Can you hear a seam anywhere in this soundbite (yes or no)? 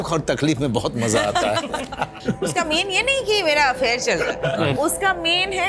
yes